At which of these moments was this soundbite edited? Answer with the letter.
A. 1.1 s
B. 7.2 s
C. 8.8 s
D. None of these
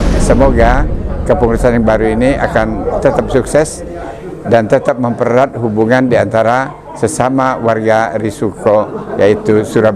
D